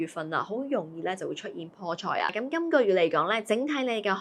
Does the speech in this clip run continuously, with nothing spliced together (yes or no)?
no